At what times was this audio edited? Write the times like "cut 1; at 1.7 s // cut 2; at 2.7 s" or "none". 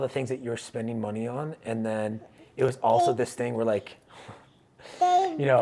none